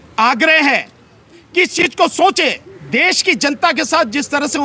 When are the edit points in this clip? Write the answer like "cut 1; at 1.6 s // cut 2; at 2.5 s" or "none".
cut 1; at 2.7 s